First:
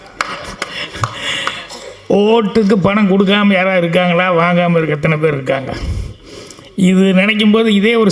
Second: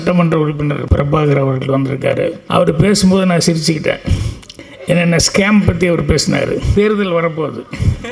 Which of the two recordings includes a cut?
second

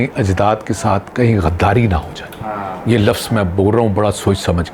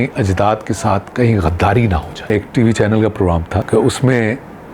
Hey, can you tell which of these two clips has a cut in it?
second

